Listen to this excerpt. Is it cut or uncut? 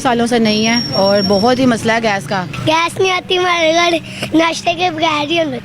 cut